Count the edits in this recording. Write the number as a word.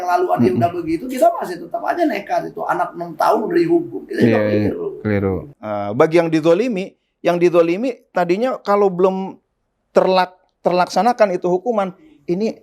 one